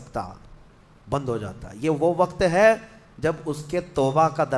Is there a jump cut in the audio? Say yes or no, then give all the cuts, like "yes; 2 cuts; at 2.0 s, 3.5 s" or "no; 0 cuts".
no; 0 cuts